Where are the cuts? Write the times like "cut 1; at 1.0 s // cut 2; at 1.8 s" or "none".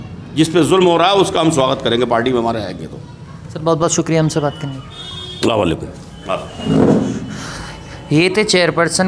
none